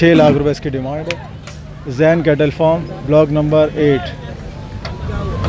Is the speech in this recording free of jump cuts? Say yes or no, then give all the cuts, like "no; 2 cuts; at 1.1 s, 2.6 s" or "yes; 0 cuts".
yes; 0 cuts